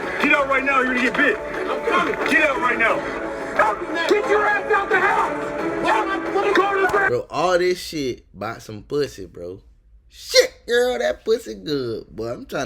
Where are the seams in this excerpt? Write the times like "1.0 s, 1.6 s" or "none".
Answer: none